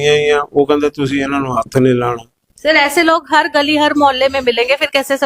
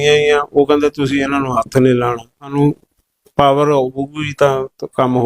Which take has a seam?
second; 1 cut; at 2.5 s

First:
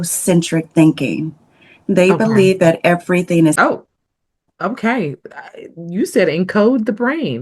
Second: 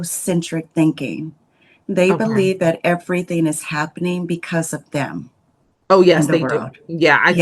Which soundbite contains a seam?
first; 1 cut; at 3.6 s

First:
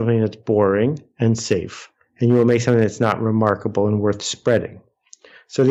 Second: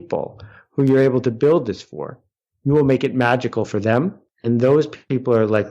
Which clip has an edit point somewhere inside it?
second; 1 cut; at 4.3 s

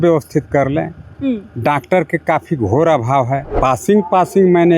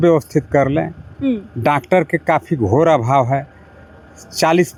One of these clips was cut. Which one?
first; 1 cut; at 3.5 s

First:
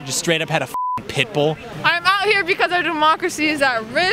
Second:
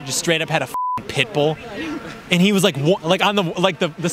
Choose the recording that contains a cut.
first; 1 cut; at 1.7 s

